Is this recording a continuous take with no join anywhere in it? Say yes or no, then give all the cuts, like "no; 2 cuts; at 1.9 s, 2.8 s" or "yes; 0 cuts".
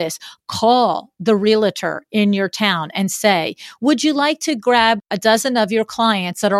no; 1 cut; at 5.1 s